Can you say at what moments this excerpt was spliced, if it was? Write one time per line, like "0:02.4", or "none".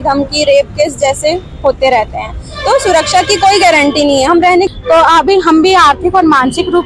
0:04.7